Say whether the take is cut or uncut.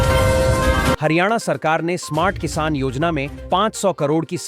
cut